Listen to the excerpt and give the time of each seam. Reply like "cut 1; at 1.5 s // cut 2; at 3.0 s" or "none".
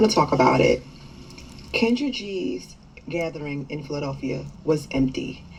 none